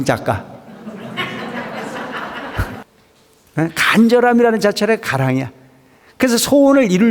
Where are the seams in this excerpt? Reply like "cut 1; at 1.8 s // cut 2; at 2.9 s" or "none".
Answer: cut 1; at 2.9 s